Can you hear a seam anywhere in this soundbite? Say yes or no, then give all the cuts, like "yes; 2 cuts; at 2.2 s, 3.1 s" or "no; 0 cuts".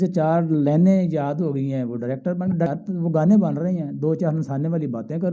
yes; 1 cut; at 2.7 s